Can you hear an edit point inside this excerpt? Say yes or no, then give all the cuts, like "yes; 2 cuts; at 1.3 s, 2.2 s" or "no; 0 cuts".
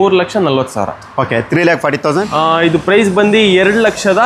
yes; 1 cut; at 2.3 s